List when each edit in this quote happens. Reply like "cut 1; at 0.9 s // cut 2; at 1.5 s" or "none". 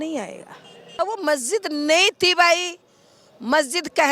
cut 1; at 1.0 s